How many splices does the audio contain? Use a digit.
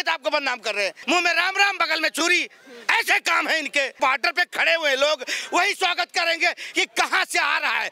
2